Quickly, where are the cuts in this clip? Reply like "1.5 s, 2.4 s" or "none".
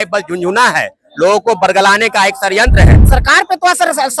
3.0 s